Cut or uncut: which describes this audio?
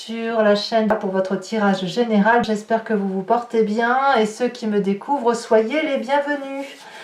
cut